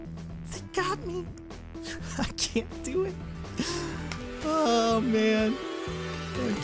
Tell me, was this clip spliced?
no; 0 cuts

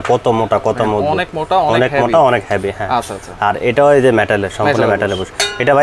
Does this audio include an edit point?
no; 0 cuts

